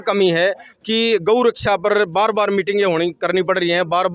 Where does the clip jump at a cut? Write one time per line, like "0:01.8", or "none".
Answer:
none